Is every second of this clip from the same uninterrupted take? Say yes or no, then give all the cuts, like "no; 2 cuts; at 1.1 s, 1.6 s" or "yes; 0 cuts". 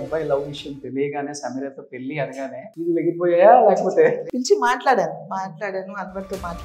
no; 2 cuts; at 2.7 s, 4.2 s